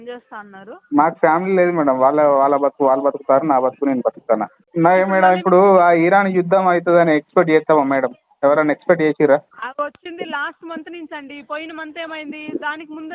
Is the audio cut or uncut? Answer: cut